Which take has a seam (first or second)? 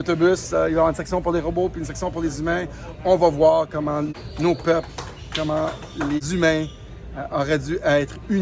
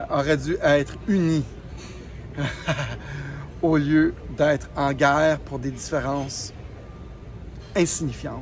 first